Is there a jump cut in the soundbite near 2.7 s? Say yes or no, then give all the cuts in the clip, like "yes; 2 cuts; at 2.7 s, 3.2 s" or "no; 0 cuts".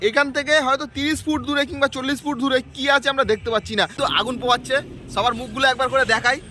no; 1 cut; at 3.9 s